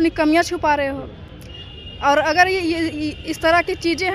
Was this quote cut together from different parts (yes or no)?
no